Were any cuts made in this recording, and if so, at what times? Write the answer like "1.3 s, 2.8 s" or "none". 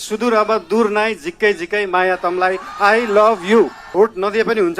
3.8 s

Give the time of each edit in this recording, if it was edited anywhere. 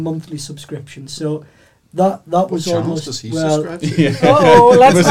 none

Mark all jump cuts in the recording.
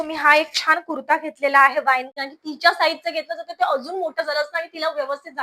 2.1 s

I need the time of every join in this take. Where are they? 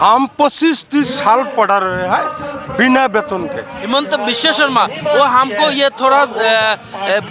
3.8 s

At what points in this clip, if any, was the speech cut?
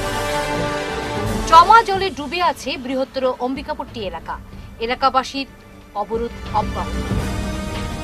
1.3 s

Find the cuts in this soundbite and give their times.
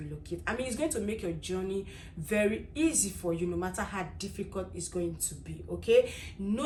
none

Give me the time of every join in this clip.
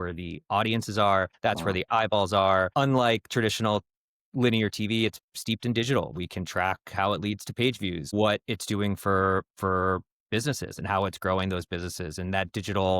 1.3 s, 2.7 s, 8.1 s

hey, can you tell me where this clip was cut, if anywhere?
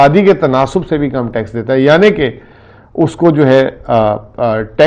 none

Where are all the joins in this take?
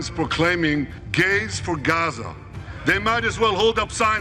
1.0 s

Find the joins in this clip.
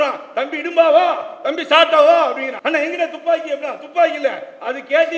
2.5 s

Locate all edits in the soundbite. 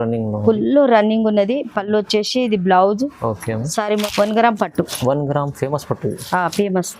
4.0 s

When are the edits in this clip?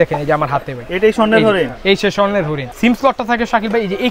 2.6 s

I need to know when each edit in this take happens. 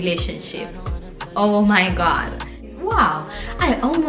2.8 s

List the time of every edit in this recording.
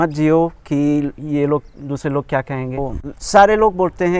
2.8 s

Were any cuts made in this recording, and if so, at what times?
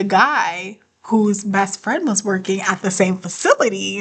none

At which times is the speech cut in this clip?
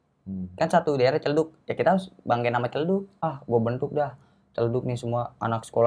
3.1 s

